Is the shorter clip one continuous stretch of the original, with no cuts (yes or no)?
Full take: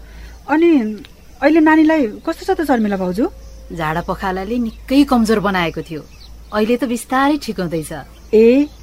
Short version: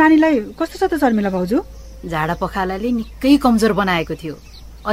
yes